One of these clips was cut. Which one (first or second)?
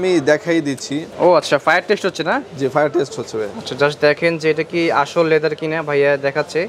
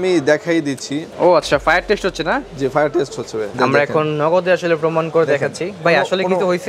second